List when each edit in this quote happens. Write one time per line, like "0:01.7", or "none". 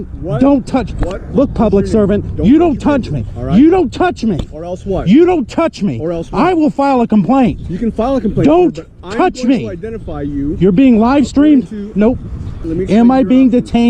0:12.7